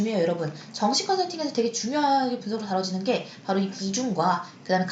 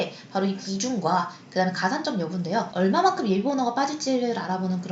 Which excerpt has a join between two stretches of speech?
second; 1 cut; at 2.7 s

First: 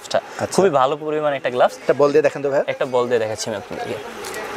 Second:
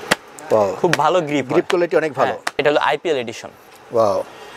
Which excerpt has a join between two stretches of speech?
second; 1 cut; at 2.6 s

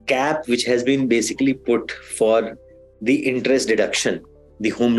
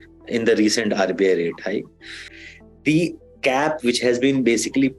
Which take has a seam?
second; 1 cut; at 2.2 s

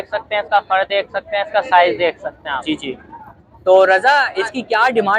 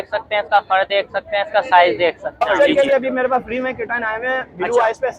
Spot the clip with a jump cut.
second; 1 cut; at 2.5 s

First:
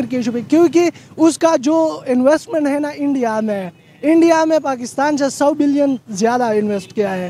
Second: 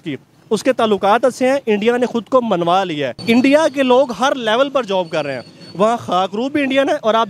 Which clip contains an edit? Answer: second; 1 cut; at 3.1 s

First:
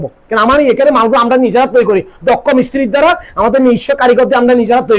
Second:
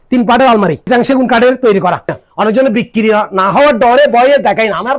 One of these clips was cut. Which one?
second; 2 cuts; at 0.8 s, 2.1 s

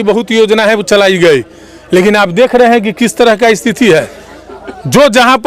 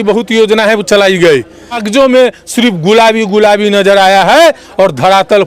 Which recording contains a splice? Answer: second; 1 cut; at 1.8 s

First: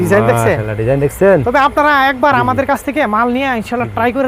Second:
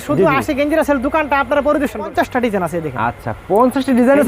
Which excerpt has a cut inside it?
second; 1 cut; at 2.1 s

